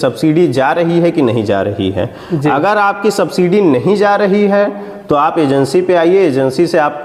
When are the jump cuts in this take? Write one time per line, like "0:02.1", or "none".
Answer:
none